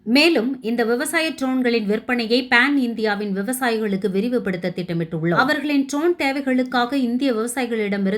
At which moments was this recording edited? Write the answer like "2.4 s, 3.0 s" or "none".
5.3 s